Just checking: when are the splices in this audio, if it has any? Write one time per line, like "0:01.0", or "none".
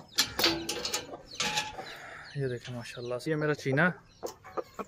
0:03.3